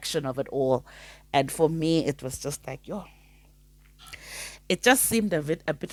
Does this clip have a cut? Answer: no; 0 cuts

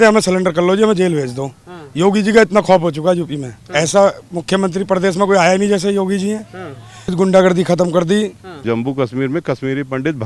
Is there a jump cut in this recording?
yes; 3 cuts; at 3.6 s, 7.1 s, 8.5 s

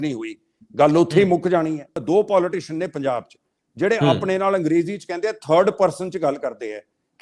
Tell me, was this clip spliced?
yes; 1 cut; at 1.9 s

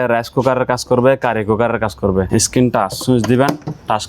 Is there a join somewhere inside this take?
yes; 1 cut; at 2.3 s

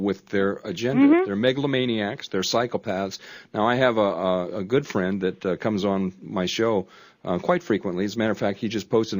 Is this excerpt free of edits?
yes; 0 cuts

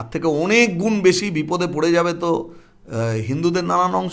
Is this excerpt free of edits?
yes; 0 cuts

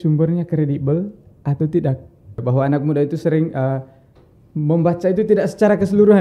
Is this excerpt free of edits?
no; 1 cut; at 2.4 s

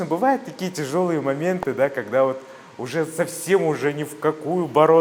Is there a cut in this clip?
no; 0 cuts

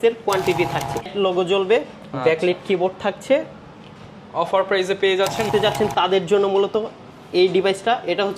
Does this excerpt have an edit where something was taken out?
yes; 2 cuts; at 1.1 s, 5.5 s

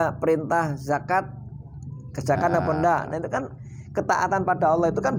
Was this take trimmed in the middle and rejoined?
no; 0 cuts

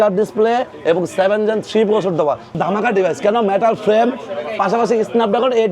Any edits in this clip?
yes; 1 cut; at 2.5 s

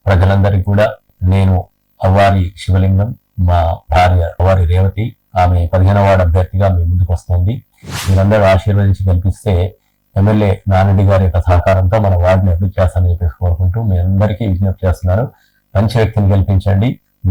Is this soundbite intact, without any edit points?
no; 2 cuts; at 1.1 s, 4.4 s

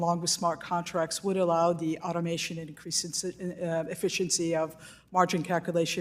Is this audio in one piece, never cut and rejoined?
yes; 0 cuts

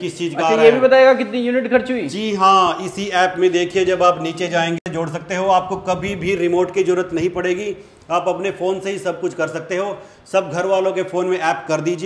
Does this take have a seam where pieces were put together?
yes; 1 cut; at 4.8 s

